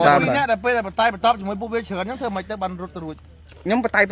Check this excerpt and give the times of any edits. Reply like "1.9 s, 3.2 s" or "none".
none